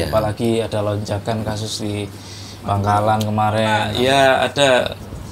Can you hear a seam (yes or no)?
yes